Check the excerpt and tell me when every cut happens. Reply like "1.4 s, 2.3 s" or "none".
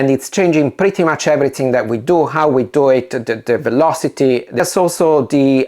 4.6 s